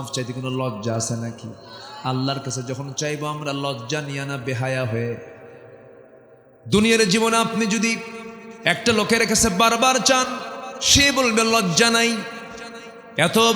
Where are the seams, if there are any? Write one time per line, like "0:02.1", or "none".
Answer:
0:06.5